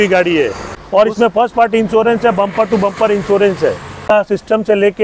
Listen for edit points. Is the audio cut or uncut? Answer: cut